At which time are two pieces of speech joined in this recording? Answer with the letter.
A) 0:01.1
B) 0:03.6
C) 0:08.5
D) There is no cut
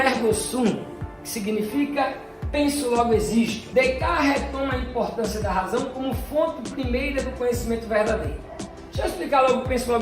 D